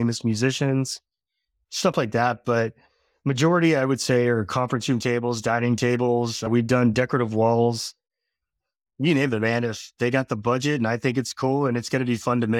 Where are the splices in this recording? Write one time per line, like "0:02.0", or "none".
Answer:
0:06.5